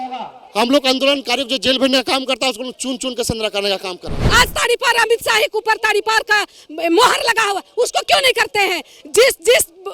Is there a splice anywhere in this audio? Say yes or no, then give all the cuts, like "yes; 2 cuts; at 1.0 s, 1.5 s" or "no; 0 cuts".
yes; 1 cut; at 4.2 s